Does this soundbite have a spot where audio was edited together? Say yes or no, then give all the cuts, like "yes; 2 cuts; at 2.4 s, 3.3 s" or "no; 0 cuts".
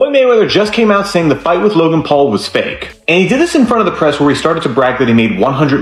no; 0 cuts